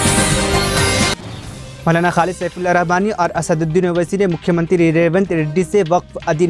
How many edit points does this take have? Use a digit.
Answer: 1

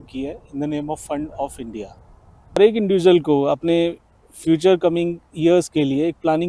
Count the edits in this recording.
1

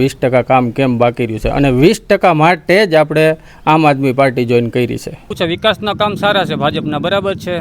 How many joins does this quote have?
1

